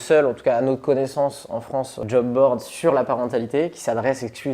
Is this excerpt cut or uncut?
cut